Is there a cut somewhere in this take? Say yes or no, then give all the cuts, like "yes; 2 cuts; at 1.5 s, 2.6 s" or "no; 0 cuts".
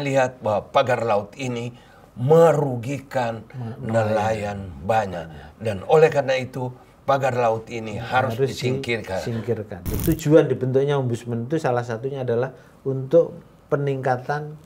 yes; 1 cut; at 10.0 s